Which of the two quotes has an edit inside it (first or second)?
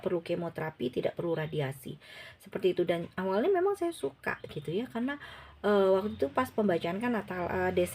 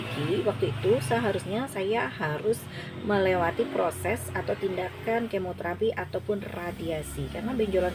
first